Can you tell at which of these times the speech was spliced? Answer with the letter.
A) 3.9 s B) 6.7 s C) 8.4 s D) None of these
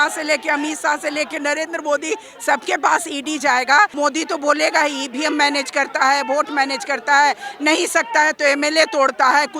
A